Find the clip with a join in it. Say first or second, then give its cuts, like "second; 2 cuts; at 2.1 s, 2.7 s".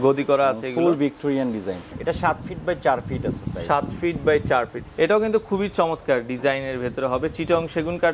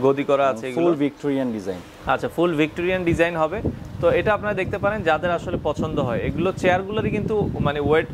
first; 2 cuts; at 2.0 s, 4.8 s